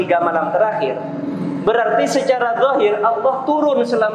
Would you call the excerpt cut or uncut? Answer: uncut